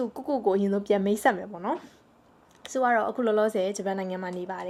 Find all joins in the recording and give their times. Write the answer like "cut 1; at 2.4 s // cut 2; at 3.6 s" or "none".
none